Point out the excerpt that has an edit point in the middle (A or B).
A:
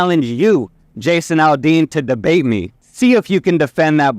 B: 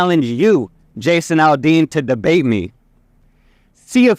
A